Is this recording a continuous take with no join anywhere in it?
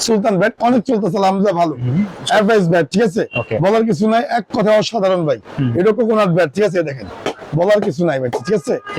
yes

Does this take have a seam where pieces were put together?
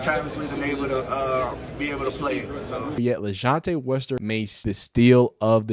yes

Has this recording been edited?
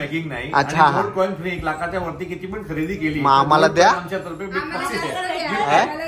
no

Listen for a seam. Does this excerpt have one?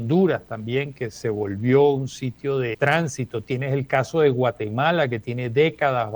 yes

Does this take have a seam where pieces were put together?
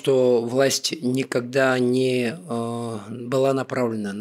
no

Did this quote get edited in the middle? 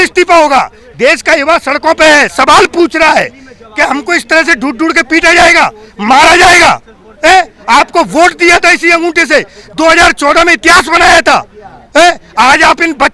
no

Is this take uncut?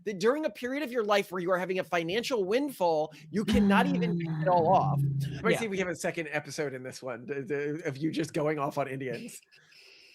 no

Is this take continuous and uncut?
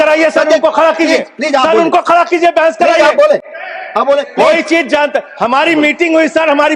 yes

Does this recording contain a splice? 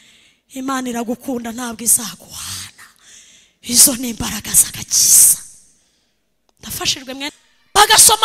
yes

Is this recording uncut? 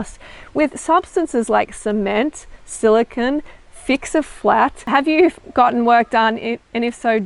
no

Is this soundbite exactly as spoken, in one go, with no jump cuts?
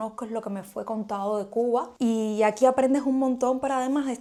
yes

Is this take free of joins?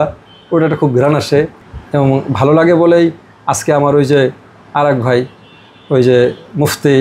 no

